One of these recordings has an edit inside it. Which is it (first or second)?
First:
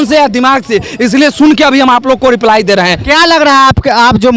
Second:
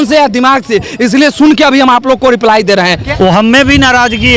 second